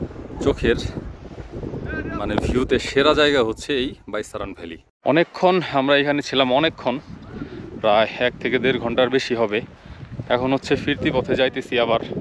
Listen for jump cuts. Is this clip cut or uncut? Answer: uncut